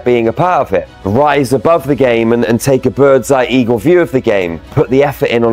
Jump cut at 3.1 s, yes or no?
no